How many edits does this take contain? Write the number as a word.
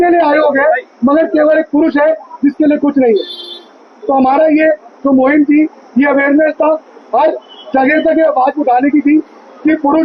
zero